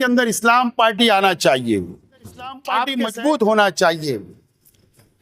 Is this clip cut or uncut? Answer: cut